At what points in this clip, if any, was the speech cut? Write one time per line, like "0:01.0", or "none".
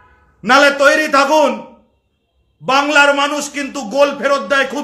none